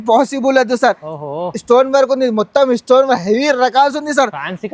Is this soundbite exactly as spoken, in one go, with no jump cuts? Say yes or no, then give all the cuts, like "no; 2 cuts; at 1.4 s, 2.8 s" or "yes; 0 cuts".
yes; 0 cuts